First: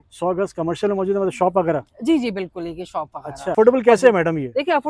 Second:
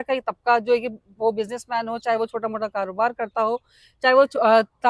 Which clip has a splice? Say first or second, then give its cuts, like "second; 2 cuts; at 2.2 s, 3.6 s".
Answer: first; 1 cut; at 3.5 s